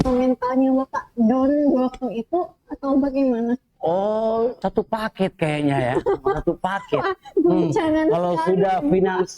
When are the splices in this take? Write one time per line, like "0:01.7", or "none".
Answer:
0:04.6